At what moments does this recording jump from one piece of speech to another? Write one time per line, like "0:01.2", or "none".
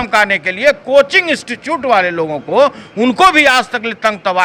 none